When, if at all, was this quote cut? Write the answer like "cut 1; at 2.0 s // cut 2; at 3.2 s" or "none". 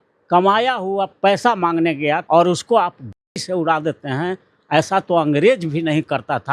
cut 1; at 2.2 s